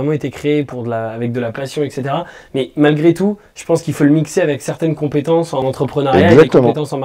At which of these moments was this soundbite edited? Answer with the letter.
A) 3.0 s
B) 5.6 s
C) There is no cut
B